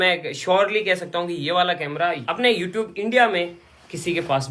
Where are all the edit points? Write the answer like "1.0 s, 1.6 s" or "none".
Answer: none